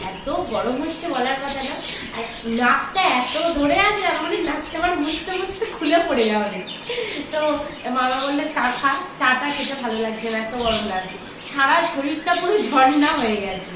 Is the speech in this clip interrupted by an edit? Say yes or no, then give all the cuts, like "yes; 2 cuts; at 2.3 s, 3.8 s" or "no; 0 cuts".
no; 0 cuts